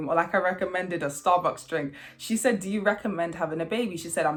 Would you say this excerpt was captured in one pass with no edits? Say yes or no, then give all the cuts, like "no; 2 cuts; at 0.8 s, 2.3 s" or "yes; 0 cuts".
yes; 0 cuts